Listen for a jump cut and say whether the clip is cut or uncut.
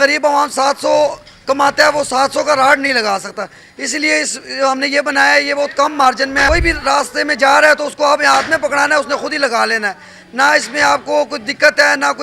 cut